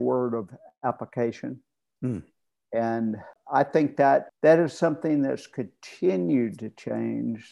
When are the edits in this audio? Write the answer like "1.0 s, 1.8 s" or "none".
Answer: 3.3 s, 4.3 s